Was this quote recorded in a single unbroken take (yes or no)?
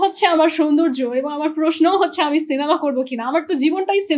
yes